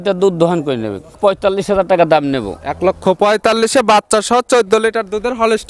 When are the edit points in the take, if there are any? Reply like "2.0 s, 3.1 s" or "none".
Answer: 1.2 s